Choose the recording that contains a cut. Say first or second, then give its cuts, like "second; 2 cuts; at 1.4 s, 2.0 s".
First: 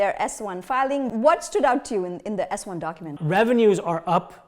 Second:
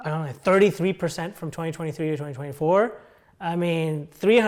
first; 2 cuts; at 1.1 s, 3.1 s